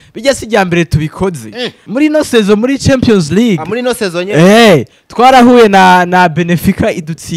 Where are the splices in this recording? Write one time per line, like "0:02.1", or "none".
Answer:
0:01.8